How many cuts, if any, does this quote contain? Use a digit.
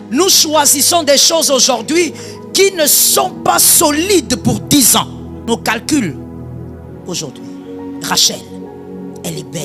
1